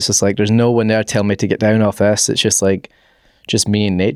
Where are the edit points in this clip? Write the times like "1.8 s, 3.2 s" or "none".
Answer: none